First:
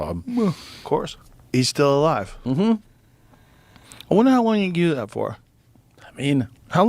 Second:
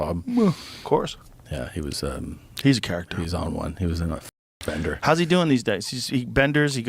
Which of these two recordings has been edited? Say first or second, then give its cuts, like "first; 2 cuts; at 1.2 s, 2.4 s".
first; 1 cut; at 1.5 s